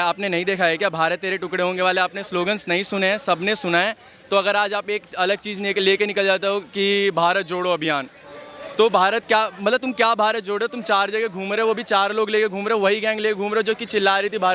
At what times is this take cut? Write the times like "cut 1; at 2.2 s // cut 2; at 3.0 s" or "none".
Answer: none